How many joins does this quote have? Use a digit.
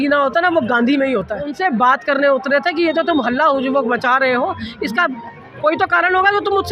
1